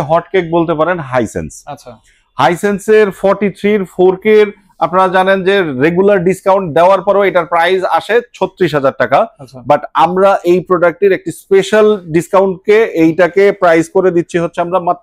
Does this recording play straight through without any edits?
yes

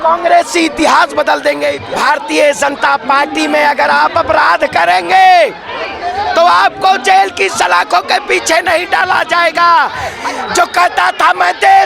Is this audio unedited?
no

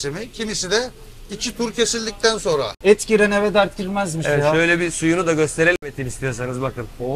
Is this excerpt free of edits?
no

